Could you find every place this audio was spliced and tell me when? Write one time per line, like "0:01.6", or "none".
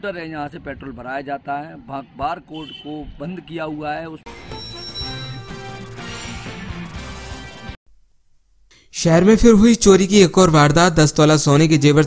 0:04.2
0:07.9